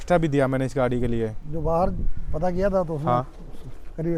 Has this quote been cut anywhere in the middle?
no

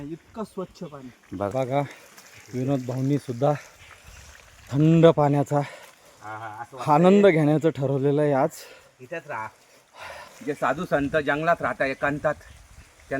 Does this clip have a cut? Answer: yes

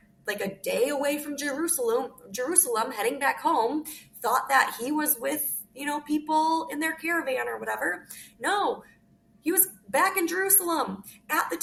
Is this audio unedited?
yes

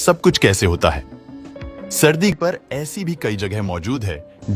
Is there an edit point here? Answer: yes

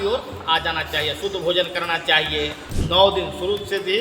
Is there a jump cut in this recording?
yes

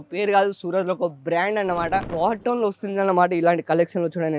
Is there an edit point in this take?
yes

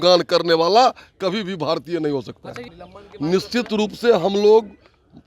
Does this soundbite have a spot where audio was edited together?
no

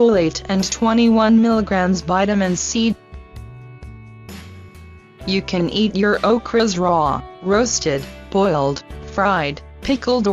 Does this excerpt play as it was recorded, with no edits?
no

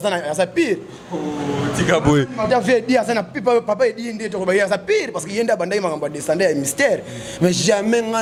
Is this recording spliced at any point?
no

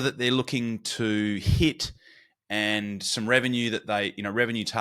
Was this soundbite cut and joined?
no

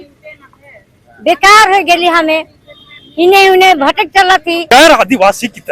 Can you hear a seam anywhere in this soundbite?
yes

